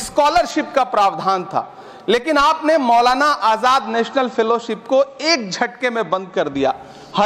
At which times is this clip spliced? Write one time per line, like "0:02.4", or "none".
none